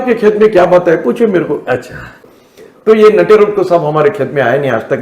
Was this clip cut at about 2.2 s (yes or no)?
yes